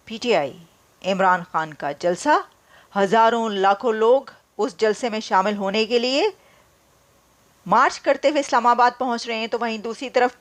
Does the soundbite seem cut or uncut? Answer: uncut